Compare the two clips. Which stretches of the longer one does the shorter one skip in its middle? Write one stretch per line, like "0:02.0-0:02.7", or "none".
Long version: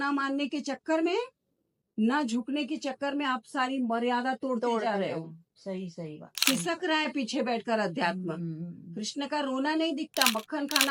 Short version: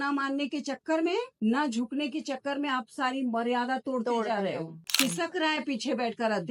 0:01.3-0:01.9
0:05.4-0:06.3